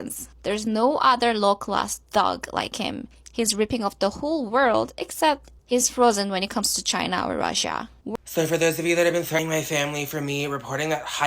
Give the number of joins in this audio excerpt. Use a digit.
2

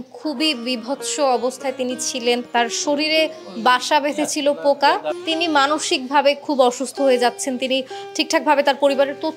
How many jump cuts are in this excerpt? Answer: 2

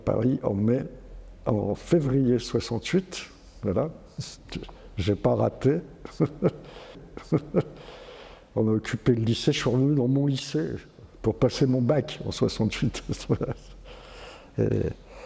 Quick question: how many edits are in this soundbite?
0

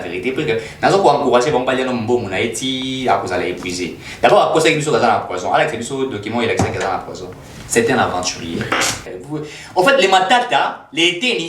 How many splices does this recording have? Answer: 1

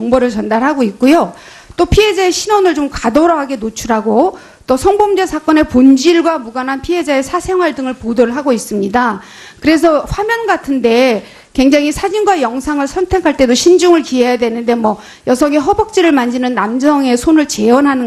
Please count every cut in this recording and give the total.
1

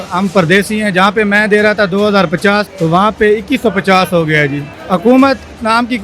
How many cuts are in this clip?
2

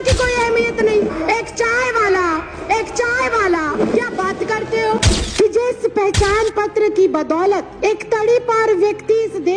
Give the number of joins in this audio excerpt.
4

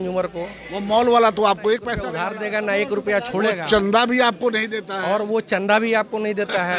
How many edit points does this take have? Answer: 1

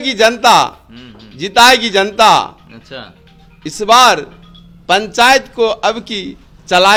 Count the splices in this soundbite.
0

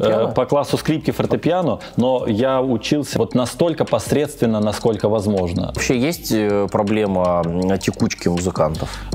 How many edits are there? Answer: 2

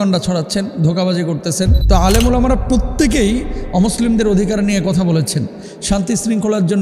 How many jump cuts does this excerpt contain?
1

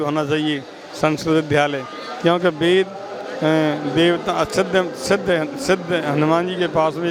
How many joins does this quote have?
0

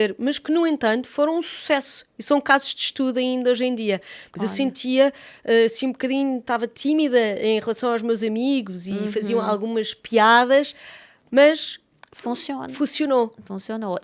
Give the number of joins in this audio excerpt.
0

